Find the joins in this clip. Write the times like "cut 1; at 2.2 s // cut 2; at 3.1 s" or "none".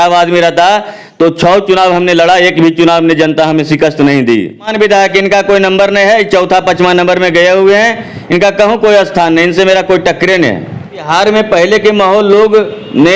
cut 1; at 4.7 s // cut 2; at 11.1 s